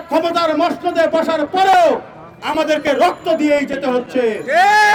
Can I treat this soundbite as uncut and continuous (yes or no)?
yes